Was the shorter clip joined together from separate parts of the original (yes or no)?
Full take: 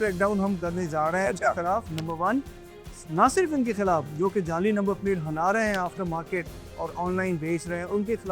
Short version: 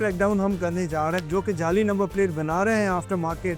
yes